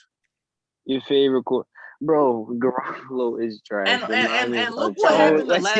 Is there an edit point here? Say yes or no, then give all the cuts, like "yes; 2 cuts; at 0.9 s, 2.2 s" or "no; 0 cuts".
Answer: no; 0 cuts